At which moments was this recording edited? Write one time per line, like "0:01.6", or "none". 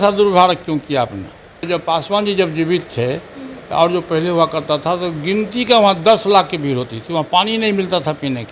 0:01.7